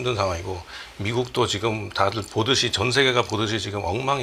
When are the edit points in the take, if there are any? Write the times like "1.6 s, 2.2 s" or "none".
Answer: none